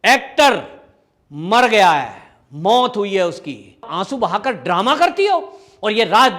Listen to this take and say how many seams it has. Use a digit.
1